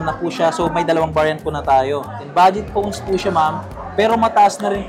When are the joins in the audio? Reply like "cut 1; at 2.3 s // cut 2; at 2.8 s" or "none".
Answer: cut 1; at 2.2 s